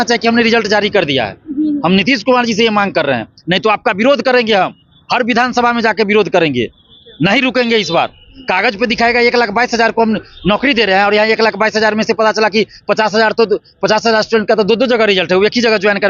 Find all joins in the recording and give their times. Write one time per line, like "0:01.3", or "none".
none